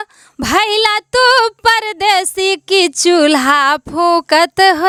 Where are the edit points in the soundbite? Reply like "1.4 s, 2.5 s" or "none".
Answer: none